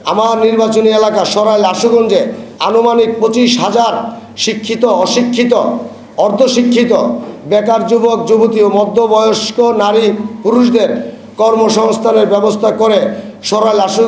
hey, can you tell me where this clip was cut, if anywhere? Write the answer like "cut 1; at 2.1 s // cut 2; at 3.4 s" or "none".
cut 1; at 2.4 s